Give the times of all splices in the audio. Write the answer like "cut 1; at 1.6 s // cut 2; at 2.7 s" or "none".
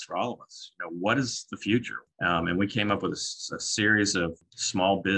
cut 1; at 2.0 s // cut 2; at 4.4 s